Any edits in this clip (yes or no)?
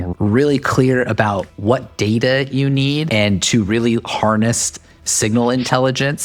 yes